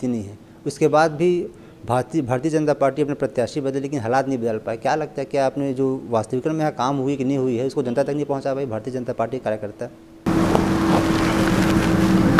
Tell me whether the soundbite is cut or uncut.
uncut